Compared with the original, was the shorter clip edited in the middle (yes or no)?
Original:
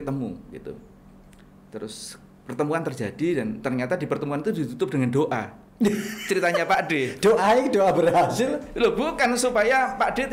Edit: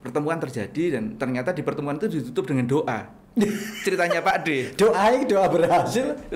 no